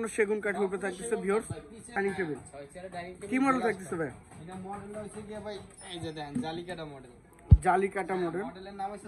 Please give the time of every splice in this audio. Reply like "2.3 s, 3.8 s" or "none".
2.0 s